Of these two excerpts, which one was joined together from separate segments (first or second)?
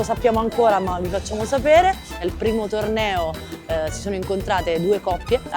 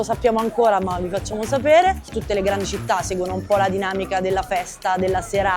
second